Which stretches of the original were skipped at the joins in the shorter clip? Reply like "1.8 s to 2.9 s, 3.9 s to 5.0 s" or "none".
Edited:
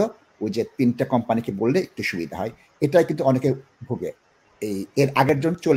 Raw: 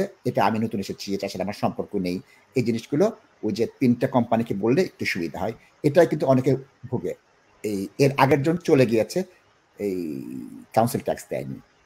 none